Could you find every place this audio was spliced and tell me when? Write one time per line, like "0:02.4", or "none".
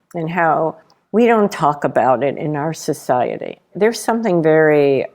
0:00.9
0:03.7